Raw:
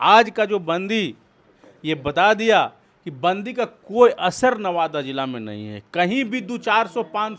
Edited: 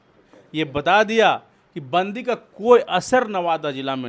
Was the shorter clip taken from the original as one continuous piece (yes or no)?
yes